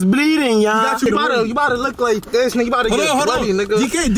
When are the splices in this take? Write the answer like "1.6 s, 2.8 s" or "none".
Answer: none